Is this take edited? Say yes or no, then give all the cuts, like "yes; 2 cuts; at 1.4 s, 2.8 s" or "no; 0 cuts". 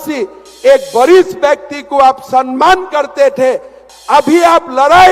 yes; 1 cut; at 3.8 s